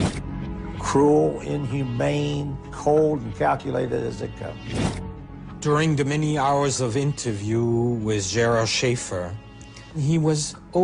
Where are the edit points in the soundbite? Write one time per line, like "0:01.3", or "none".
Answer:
0:07.1